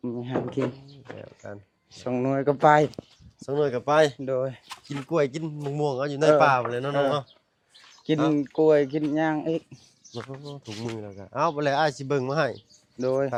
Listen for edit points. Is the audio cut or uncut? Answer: uncut